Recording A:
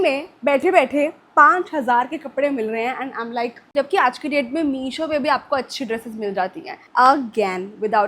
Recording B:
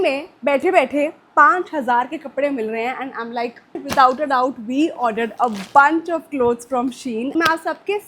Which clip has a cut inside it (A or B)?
A